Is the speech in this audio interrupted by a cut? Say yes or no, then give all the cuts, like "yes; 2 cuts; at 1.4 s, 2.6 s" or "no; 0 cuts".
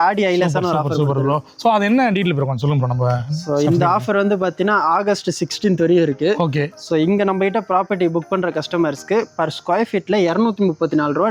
no; 0 cuts